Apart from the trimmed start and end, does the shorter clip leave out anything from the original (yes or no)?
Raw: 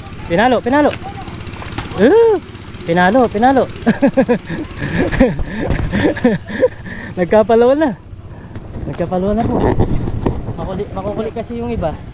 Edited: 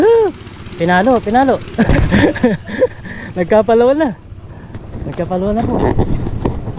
yes